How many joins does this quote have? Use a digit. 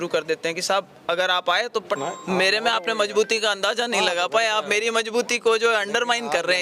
1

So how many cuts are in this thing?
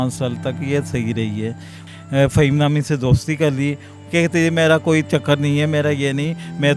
2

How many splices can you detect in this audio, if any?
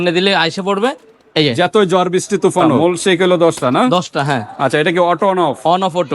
1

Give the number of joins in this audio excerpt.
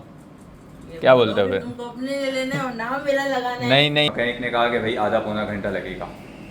1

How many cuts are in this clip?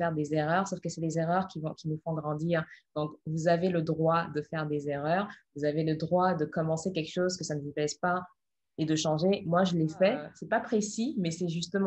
1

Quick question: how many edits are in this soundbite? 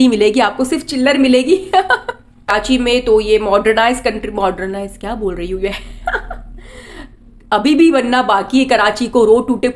1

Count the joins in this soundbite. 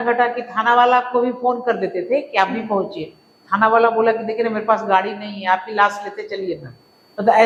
0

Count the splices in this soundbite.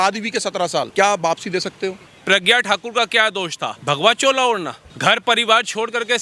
4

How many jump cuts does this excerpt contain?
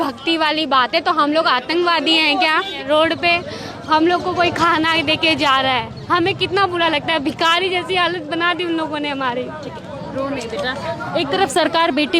1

